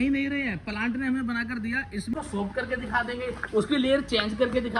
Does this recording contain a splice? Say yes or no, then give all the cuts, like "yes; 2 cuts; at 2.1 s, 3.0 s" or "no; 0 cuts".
yes; 1 cut; at 2.1 s